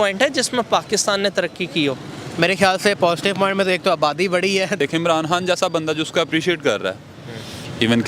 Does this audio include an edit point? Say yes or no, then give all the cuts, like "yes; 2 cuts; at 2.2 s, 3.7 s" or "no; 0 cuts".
yes; 1 cut; at 4.8 s